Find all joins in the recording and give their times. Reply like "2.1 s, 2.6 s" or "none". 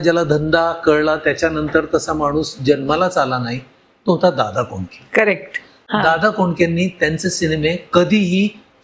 none